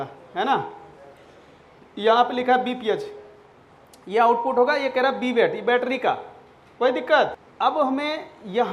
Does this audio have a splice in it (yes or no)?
yes